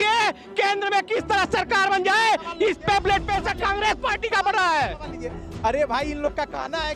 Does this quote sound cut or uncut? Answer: uncut